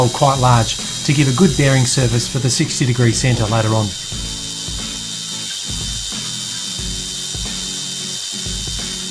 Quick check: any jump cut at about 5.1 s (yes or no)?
no